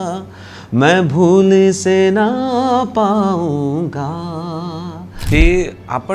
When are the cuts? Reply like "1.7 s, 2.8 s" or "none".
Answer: 5.1 s